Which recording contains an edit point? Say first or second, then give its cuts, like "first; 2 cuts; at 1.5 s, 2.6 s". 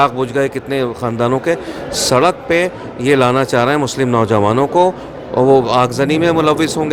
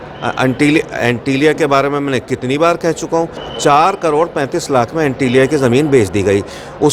second; 1 cut; at 3.4 s